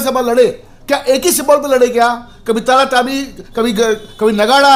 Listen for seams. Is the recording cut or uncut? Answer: uncut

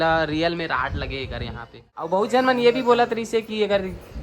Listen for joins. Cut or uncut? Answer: cut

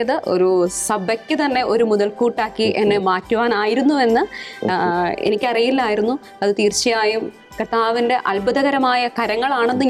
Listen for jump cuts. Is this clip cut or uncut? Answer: uncut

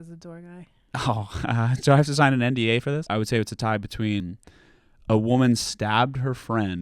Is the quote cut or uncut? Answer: cut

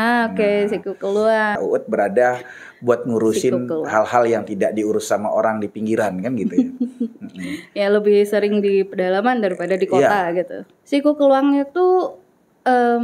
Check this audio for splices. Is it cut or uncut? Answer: cut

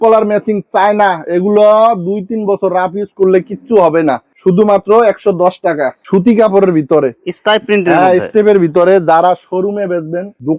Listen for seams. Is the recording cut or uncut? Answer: uncut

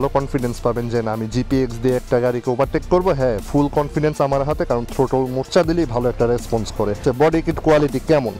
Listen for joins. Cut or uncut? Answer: uncut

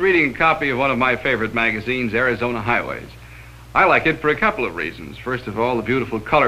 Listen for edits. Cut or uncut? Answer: uncut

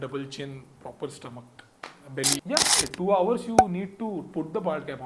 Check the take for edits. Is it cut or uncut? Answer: cut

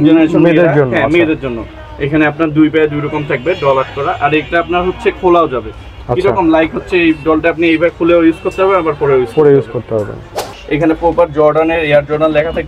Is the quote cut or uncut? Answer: cut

